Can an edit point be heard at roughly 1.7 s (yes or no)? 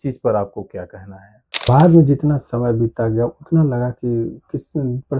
yes